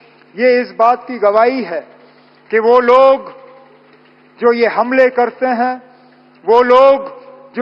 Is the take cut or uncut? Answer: uncut